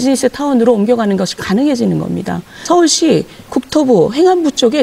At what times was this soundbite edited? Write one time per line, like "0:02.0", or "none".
0:02.6